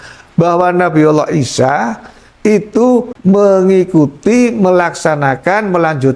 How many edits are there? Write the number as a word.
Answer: one